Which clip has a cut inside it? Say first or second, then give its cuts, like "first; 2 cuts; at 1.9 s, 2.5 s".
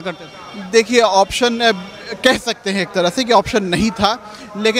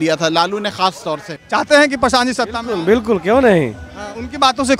second; 1 cut; at 1.4 s